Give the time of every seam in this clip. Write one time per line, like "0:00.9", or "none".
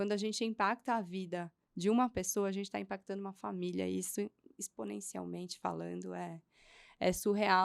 none

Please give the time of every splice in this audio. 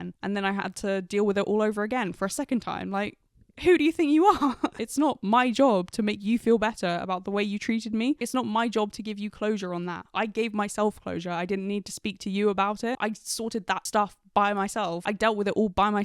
0:04.8
0:08.2
0:13.4
0:15.0

